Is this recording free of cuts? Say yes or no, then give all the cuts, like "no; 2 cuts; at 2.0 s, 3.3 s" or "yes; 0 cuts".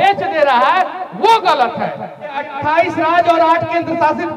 no; 1 cut; at 2.4 s